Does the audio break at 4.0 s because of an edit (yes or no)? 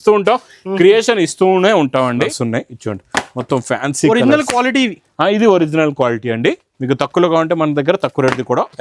no